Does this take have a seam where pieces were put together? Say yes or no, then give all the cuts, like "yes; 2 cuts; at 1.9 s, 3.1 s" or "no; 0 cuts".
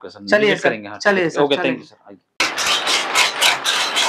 no; 0 cuts